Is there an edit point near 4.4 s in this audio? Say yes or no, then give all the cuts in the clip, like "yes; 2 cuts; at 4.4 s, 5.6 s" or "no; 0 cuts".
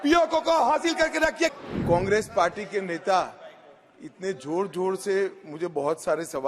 no; 1 cut; at 1.5 s